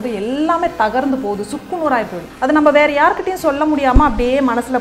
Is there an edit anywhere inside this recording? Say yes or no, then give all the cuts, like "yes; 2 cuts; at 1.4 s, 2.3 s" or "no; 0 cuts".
yes; 1 cut; at 2.2 s